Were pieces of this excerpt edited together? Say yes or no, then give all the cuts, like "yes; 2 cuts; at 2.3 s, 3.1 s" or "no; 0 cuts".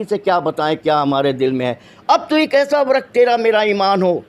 yes; 1 cut; at 1.9 s